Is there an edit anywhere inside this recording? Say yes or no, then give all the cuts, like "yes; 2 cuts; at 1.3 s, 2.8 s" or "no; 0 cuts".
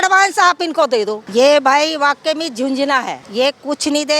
yes; 2 cuts; at 1.2 s, 3.2 s